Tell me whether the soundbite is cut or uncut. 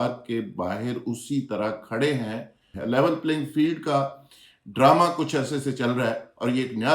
cut